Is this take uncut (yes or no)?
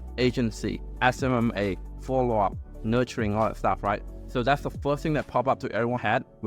yes